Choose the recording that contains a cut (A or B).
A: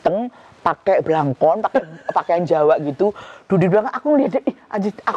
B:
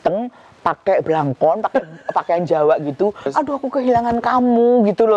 B